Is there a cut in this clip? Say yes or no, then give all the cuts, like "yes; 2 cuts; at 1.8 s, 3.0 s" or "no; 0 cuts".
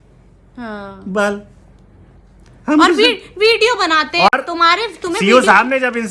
no; 0 cuts